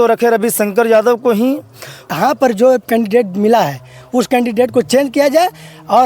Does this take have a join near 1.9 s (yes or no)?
yes